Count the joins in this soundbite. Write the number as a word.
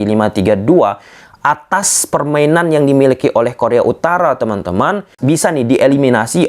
one